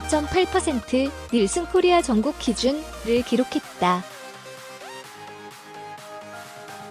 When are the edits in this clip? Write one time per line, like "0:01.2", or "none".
0:04.6